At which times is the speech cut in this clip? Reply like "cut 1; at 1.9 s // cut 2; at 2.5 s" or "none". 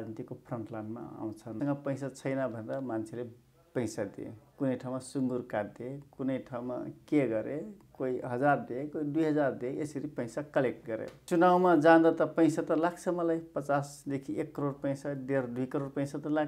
cut 1; at 1.5 s // cut 2; at 11.1 s